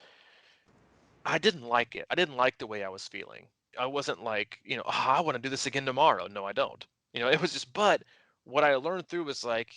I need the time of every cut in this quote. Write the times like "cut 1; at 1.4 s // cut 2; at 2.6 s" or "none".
cut 1; at 3.6 s